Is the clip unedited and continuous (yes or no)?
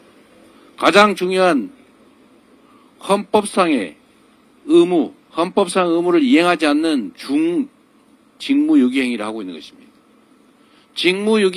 no